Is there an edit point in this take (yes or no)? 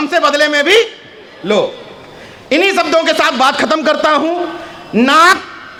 no